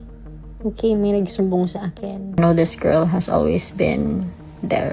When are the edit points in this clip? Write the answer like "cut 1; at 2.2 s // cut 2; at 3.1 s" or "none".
cut 1; at 2.4 s

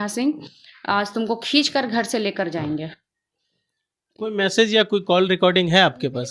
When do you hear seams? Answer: none

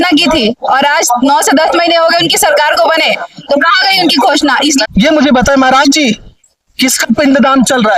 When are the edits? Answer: cut 1; at 4.9 s

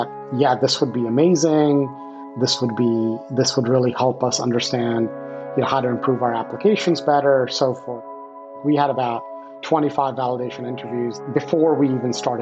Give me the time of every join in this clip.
cut 1; at 8.2 s // cut 2; at 11.2 s

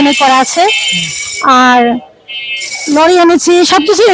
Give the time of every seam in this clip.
none

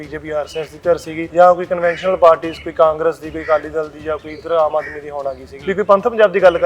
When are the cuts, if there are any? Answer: cut 1; at 1.2 s // cut 2; at 5.5 s

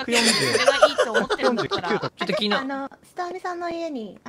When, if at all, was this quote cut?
cut 1; at 2.1 s

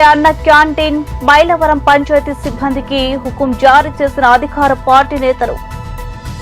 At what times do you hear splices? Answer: none

